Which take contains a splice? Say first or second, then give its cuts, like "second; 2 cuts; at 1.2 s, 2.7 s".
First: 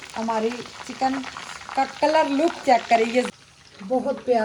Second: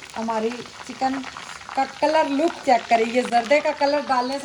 first; 1 cut; at 3.3 s